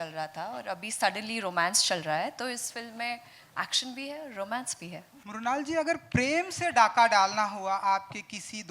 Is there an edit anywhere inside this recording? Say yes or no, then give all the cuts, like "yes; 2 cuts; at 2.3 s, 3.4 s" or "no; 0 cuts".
yes; 1 cut; at 5.1 s